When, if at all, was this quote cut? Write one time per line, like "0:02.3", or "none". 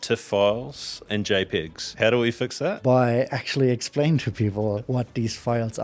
0:01.0
0:01.9
0:02.8
0:04.8